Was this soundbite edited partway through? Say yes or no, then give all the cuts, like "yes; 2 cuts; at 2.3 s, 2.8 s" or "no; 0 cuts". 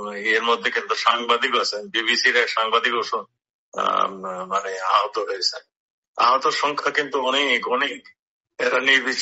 no; 0 cuts